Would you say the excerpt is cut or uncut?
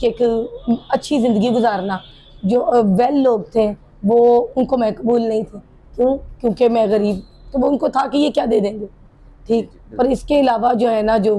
uncut